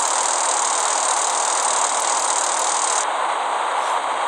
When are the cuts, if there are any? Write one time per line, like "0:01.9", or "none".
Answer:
none